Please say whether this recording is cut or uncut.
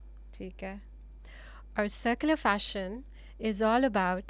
uncut